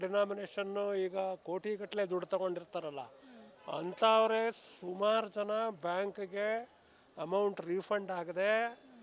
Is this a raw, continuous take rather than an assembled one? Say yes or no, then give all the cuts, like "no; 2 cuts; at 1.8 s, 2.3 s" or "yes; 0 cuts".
yes; 0 cuts